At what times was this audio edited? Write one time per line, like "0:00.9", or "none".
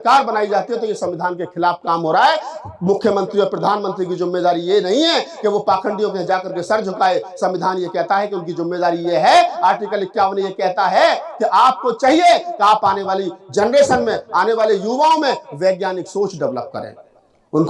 none